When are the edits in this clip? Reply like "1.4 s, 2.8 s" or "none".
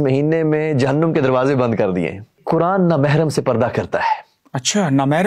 2.4 s